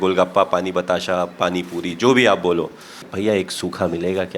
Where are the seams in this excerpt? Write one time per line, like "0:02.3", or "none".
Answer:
0:03.0